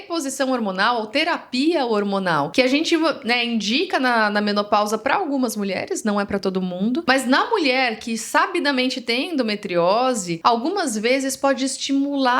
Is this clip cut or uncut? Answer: cut